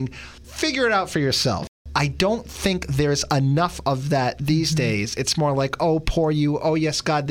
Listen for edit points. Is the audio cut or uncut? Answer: cut